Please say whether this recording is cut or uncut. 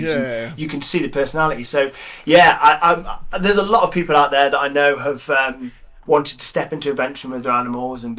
uncut